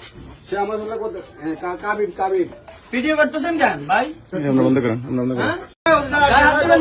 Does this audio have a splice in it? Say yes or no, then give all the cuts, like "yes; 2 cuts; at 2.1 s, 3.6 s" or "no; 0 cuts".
yes; 1 cut; at 5.9 s